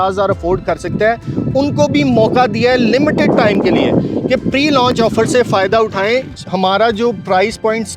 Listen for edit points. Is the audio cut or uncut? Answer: cut